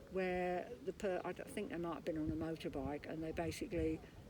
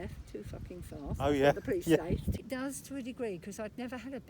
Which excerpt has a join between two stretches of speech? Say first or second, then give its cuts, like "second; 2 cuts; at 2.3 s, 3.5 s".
second; 1 cut; at 2.4 s